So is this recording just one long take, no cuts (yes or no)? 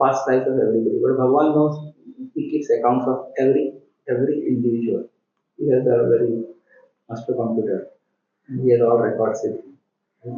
yes